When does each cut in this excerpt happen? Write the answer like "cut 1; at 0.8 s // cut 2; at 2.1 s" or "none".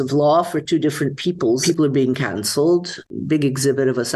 cut 1; at 1.6 s // cut 2; at 3.1 s